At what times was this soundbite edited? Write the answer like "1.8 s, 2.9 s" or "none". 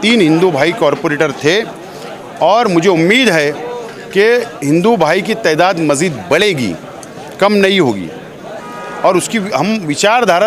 none